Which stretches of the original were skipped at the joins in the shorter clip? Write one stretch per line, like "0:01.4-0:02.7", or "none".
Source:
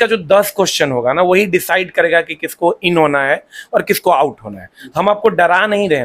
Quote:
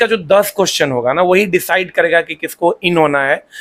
none

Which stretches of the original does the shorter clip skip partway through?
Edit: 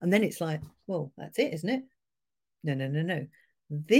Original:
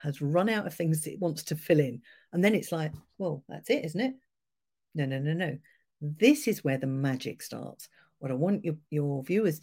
none

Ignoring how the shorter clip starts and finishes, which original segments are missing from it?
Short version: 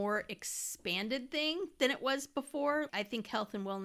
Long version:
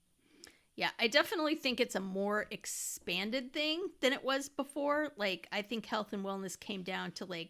0:05.1-0:05.5

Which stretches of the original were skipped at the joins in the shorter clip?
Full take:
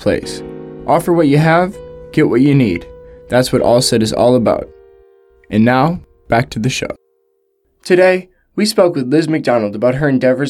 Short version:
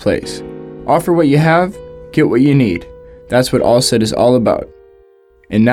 none

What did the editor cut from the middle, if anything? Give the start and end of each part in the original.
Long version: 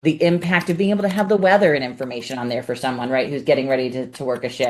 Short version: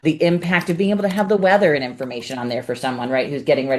none

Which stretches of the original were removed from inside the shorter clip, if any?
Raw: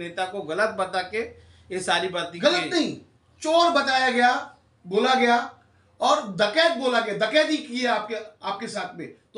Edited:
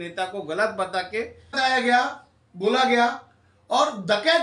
0:01.6-0:03.9

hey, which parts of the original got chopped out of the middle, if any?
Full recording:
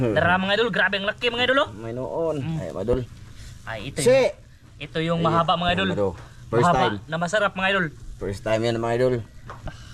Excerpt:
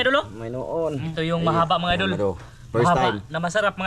0:02.5-0:04.8

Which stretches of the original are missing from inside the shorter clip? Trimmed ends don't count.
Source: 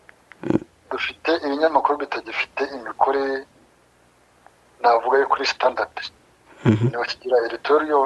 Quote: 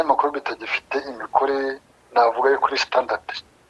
0:03.6-0:04.6

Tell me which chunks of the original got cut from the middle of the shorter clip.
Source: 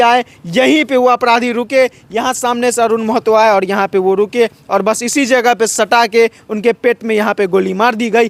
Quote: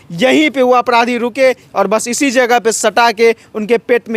0:02.0-0:04.6

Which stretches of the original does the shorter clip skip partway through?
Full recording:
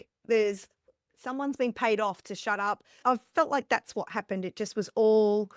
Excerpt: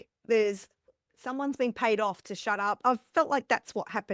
0:02.8-0:03.0

